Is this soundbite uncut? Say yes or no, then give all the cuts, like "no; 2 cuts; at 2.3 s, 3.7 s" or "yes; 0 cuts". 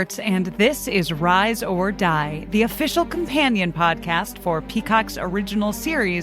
yes; 0 cuts